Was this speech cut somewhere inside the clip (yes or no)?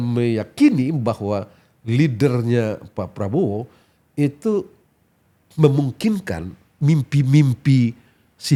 no